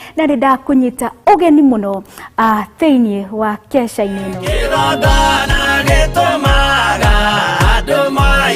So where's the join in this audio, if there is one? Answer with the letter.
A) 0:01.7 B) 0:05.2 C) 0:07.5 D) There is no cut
B